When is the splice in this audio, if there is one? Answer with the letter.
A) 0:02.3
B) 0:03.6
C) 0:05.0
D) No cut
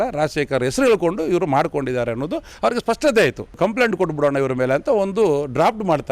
B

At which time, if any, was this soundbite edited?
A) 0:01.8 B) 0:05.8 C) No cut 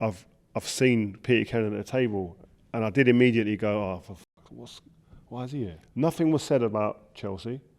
B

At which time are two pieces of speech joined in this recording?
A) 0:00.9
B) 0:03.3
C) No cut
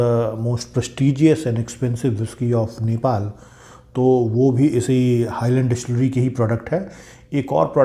C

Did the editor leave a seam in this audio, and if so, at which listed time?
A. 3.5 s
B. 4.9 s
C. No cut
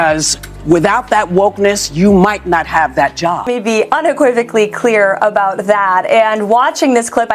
A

